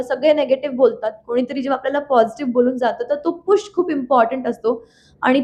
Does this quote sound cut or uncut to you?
uncut